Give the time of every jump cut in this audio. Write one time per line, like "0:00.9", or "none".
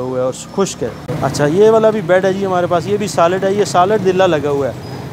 0:01.1